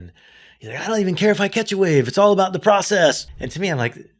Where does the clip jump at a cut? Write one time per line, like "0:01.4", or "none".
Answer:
0:03.2

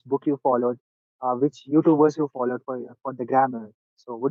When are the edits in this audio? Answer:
none

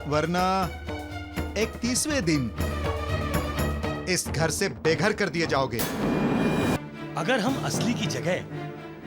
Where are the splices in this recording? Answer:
0:06.8

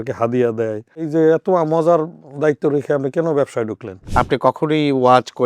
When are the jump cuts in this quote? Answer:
0:01.1
0:04.0

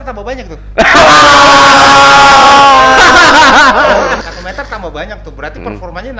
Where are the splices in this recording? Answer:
0:04.3

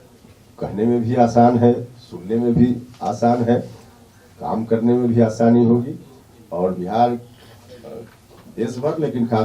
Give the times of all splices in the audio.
none

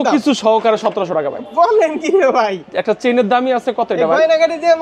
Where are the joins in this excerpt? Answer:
none

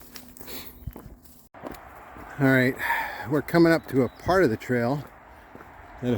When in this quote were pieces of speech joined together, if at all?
0:01.5

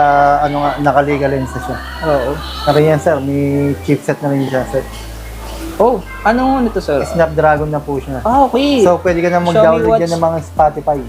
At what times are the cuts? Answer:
0:02.7

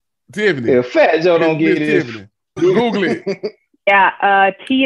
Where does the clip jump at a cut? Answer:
0:02.6
0:03.9

